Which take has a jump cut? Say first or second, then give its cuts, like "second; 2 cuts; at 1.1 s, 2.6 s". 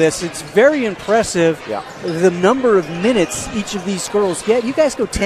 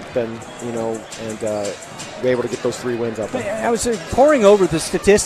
second; 1 cut; at 1.0 s